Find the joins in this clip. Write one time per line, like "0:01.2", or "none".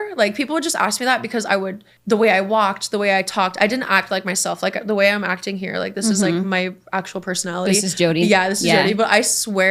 none